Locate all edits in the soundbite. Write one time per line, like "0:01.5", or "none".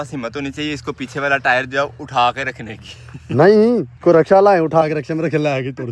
none